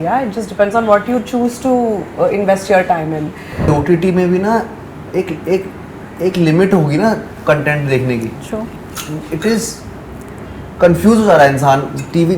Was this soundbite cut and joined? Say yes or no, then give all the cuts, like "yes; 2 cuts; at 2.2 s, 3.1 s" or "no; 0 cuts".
yes; 1 cut; at 3.7 s